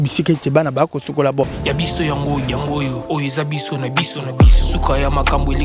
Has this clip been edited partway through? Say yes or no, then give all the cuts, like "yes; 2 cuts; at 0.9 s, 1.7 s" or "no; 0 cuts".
yes; 1 cut; at 1.6 s